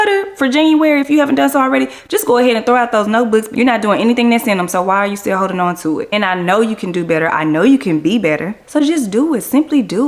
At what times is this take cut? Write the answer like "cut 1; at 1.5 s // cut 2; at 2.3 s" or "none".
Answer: none